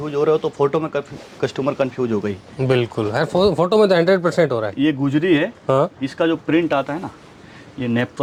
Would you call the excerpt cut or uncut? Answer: uncut